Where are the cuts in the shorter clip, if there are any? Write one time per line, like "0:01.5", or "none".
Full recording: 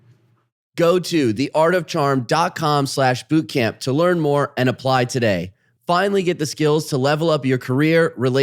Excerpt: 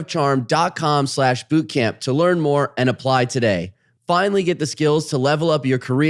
none